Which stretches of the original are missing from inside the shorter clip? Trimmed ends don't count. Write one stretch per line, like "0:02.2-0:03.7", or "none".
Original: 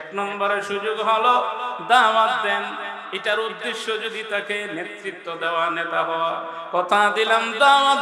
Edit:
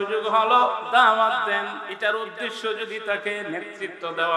0:01.6-0:01.8
0:02.8-0:03.1